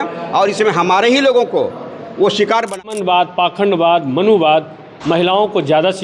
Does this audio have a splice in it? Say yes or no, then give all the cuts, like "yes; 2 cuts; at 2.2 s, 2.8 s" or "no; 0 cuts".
yes; 1 cut; at 2.8 s